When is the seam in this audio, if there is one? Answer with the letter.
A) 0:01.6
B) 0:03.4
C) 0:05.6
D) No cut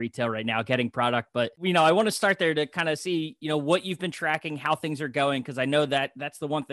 A